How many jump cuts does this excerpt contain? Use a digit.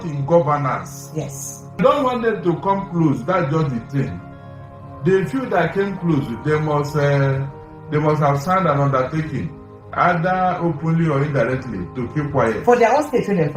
1